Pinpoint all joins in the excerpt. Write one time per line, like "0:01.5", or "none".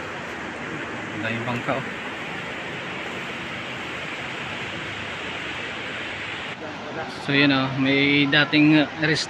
0:06.5

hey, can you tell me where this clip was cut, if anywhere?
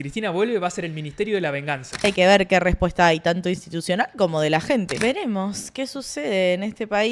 0:02.0
0:04.9

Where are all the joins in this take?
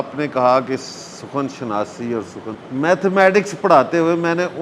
0:02.6

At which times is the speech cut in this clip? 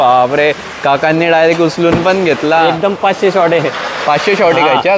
none

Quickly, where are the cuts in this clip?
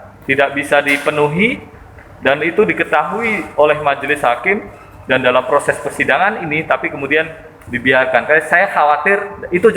none

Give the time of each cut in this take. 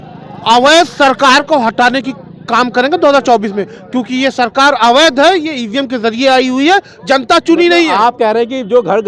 none

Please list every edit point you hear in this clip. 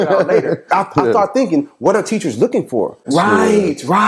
0:03.0

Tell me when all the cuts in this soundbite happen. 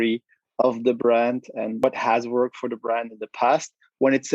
0:01.8

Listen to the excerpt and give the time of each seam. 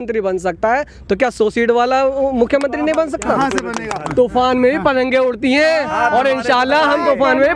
0:04.0

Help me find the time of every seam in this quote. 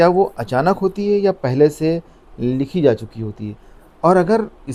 none

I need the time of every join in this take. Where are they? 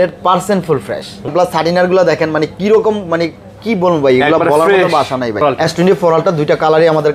0:01.3
0:05.4

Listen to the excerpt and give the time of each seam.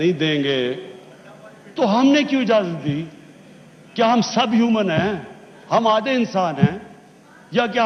none

